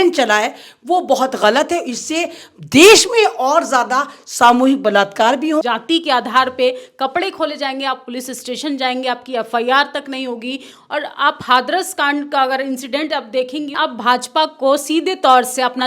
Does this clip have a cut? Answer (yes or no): yes